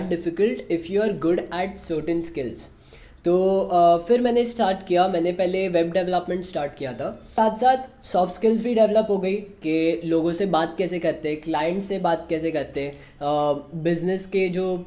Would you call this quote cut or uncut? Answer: cut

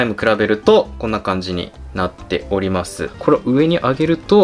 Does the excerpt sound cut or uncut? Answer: cut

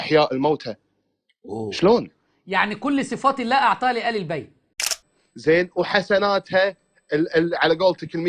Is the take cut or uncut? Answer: cut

